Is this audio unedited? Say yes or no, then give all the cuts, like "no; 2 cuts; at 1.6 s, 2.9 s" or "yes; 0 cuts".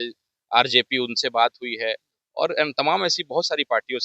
yes; 0 cuts